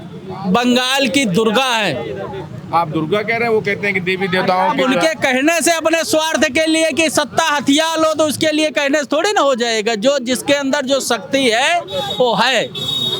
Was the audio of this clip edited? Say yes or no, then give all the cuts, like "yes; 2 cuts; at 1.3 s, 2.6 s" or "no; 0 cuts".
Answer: no; 0 cuts